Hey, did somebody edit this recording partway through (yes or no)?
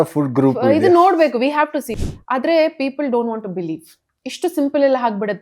yes